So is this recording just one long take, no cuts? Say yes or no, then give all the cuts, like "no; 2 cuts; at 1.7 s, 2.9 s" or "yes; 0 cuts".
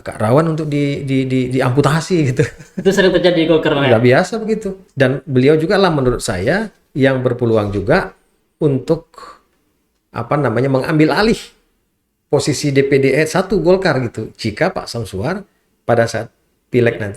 no; 1 cut; at 4.8 s